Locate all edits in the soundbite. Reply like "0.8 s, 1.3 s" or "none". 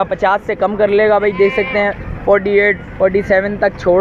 none